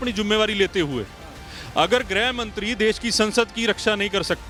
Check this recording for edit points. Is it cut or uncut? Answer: uncut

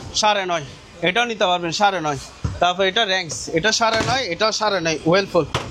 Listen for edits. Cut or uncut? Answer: uncut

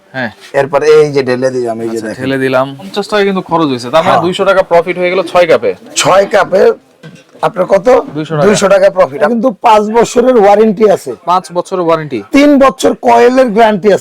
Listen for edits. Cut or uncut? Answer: cut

